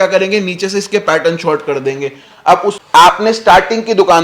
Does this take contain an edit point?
yes; 1 cut; at 2.8 s

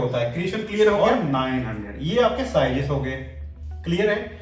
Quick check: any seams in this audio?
yes; 1 cut; at 1.0 s

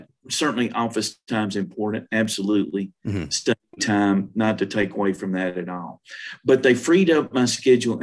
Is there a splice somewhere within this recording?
no; 0 cuts

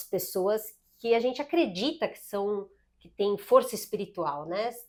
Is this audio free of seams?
yes; 0 cuts

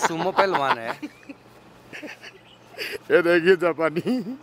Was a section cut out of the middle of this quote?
no; 0 cuts

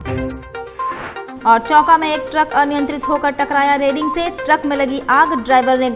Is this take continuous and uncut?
yes; 0 cuts

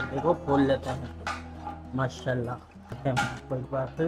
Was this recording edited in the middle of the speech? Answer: yes; 1 cut; at 3.0 s

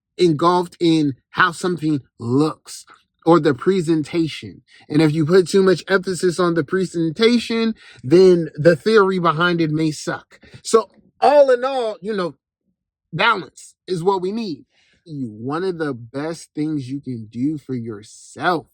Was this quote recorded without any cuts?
no; 1 cut; at 15.1 s

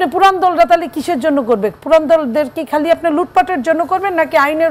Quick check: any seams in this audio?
no; 0 cuts

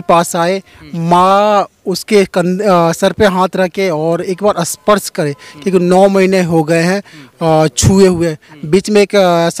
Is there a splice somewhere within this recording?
no; 0 cuts

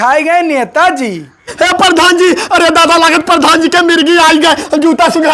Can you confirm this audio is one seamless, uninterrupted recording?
no; 1 cut; at 1.5 s

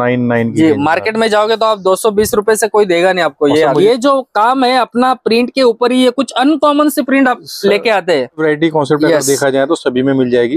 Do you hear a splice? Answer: yes; 2 cuts; at 3.8 s, 8.4 s

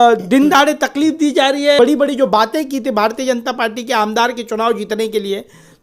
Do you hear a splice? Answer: yes; 1 cut; at 1.8 s

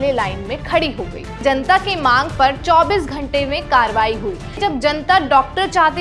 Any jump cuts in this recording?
yes; 2 cuts; at 1.4 s, 4.6 s

